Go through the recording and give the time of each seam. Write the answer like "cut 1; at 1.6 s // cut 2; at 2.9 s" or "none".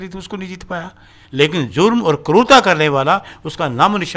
cut 1; at 1.1 s